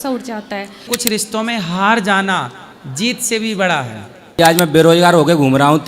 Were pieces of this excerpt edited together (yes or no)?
yes